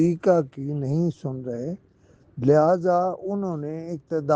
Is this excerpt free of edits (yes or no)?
yes